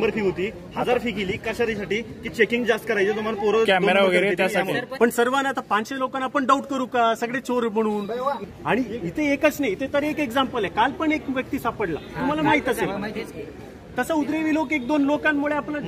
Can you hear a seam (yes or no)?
yes